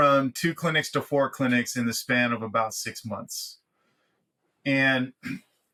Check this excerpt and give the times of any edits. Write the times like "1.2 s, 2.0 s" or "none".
none